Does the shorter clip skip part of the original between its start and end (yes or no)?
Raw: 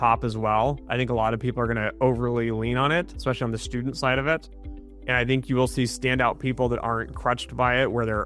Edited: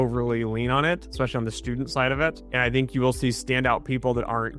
yes